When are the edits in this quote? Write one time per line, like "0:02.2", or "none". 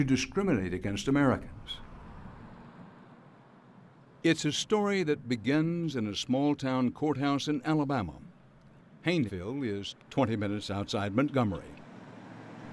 0:03.2